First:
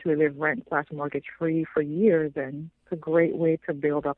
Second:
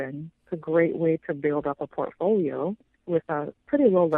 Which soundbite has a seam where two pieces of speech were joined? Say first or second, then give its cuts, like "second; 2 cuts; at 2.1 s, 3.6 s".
second; 1 cut; at 2.9 s